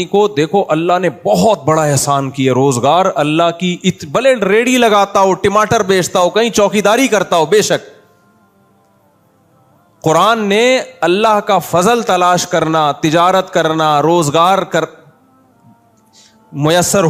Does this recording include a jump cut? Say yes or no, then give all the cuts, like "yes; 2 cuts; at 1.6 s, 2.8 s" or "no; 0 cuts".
no; 0 cuts